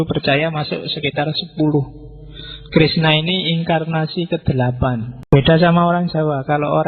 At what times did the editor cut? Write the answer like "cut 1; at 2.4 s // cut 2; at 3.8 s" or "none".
cut 1; at 5.1 s